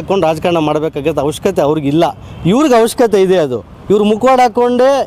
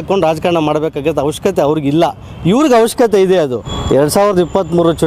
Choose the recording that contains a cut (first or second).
second